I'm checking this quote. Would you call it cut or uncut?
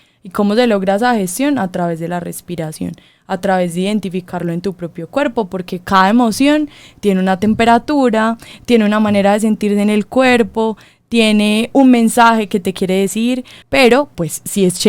cut